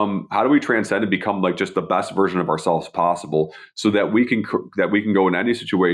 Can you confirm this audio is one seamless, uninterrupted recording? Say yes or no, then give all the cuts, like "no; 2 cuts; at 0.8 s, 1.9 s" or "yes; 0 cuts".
yes; 0 cuts